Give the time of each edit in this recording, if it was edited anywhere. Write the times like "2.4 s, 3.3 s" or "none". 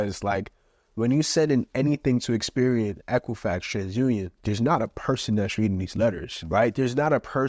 6.3 s